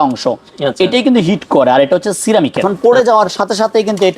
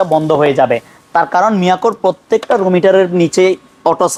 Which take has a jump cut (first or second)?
first